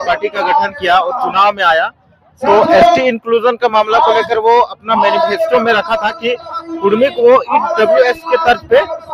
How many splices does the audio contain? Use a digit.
0